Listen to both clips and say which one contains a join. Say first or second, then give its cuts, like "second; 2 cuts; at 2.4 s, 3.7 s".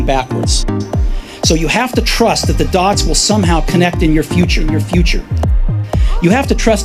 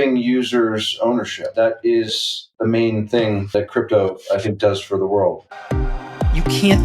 second; 4 cuts; at 1.5 s, 2.4 s, 3.5 s, 5.5 s